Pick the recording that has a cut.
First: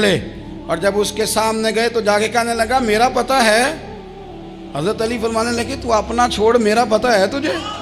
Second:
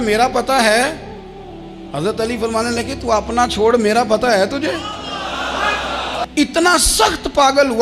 second; 1 cut; at 6.2 s

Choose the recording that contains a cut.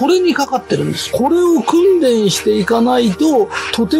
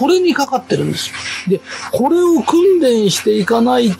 first; 1 cut; at 1.0 s

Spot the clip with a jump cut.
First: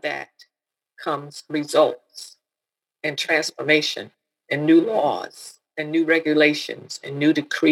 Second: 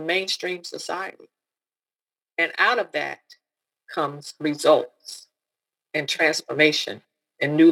second; 1 cut; at 1.8 s

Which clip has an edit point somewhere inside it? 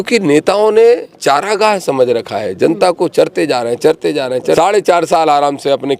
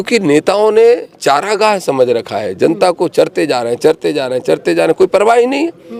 first; 1 cut; at 4.6 s

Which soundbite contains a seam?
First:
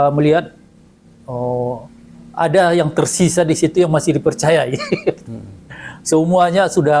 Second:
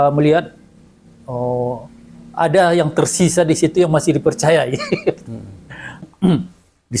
second; 1 cut; at 6.1 s

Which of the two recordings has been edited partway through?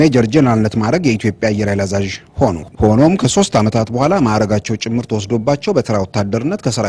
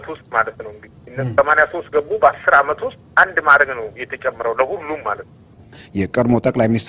second; 1 cut; at 5.8 s

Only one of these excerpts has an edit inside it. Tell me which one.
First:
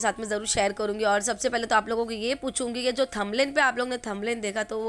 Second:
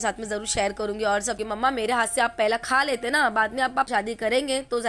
second; 2 cuts; at 1.7 s, 3.9 s

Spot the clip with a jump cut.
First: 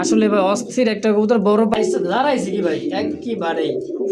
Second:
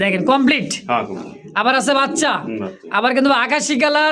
first; 1 cut; at 1.7 s

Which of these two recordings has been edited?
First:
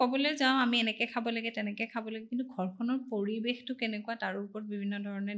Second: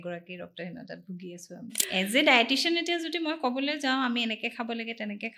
second; 1 cut; at 1.8 s

